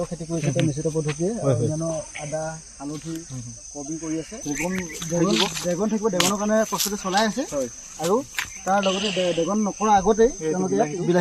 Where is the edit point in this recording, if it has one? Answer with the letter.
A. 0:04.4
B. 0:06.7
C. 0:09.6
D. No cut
A